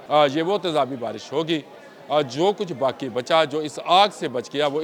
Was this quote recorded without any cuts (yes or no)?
yes